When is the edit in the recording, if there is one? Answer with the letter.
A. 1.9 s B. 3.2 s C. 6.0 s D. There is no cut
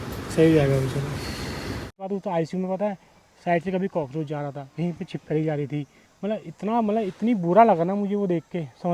A